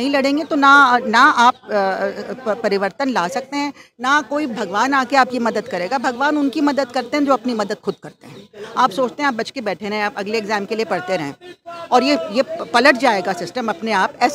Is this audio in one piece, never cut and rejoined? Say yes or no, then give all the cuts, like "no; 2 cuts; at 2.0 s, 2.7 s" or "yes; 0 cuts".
yes; 0 cuts